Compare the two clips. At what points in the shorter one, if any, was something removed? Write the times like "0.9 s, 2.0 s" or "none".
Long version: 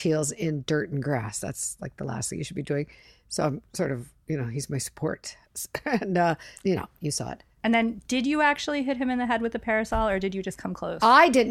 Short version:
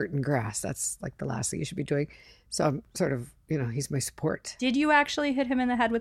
4.5 s